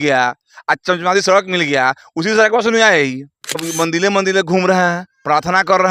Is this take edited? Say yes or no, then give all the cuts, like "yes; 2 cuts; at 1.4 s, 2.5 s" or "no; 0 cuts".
yes; 1 cut; at 3.7 s